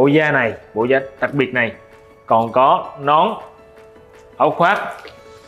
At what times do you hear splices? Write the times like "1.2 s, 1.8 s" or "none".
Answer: none